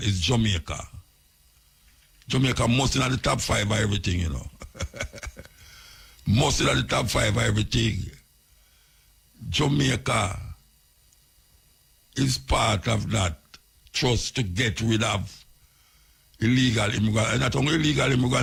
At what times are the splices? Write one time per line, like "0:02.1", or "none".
none